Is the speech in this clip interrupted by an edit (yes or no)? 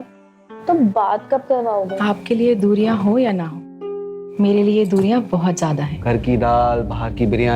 yes